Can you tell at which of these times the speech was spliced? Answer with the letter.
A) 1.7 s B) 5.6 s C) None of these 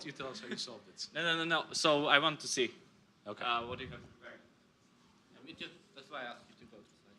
A